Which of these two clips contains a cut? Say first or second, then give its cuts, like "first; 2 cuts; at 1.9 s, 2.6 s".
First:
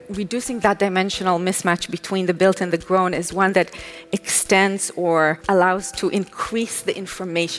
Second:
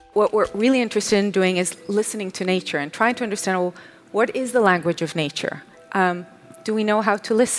first; 1 cut; at 5.4 s